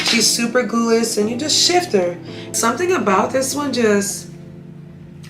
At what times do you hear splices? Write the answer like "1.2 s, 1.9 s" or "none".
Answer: 2.5 s